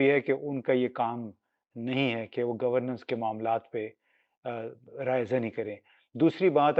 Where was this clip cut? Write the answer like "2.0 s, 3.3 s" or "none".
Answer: none

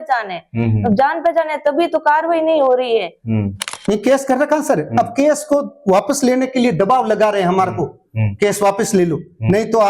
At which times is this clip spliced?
3.7 s

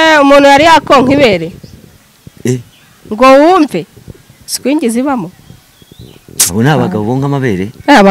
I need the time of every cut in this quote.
none

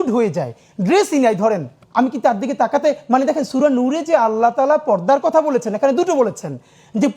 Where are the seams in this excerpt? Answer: 1.8 s

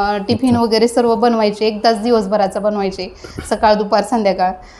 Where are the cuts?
none

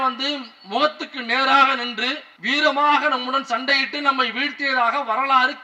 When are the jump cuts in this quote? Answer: 2.3 s

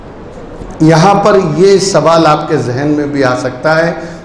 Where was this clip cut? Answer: none

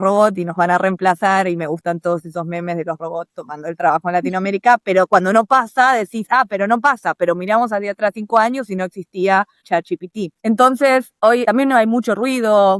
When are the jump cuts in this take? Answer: none

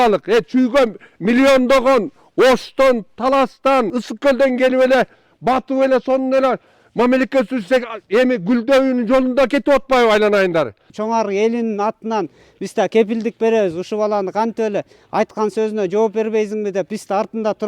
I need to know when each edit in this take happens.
4.0 s, 10.9 s

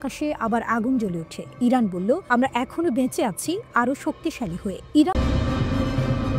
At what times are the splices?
5.2 s

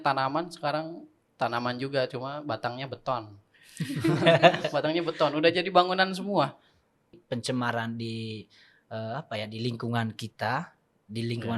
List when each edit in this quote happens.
7.1 s

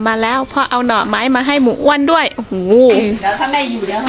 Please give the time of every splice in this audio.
3.0 s

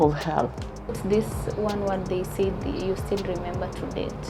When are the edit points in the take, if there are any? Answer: 1.0 s

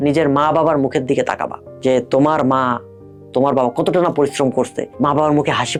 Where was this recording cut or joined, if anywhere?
none

